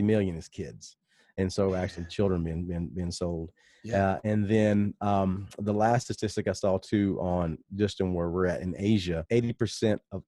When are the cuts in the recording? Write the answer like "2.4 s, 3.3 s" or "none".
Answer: 9.2 s